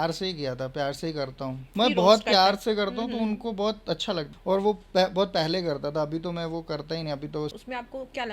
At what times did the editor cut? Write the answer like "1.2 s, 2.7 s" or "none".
1.7 s, 4.3 s, 7.5 s